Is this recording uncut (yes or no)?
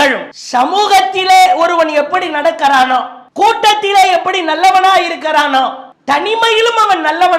yes